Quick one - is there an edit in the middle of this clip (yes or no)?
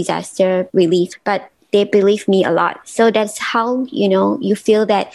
yes